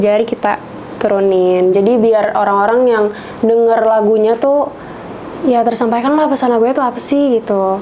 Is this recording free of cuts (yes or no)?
yes